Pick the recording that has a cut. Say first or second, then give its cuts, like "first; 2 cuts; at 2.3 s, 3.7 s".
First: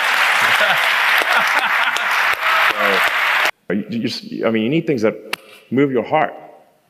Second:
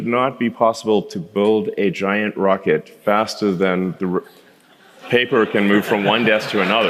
first; 1 cut; at 3.5 s